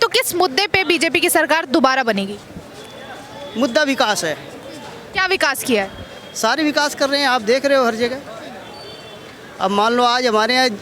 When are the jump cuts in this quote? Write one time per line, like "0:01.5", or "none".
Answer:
none